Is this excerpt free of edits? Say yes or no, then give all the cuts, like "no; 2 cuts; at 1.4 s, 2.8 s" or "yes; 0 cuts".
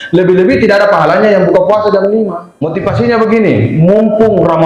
no; 1 cut; at 3.0 s